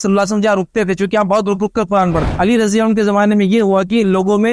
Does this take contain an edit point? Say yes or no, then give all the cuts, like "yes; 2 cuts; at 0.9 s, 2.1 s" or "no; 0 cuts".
yes; 1 cut; at 2.3 s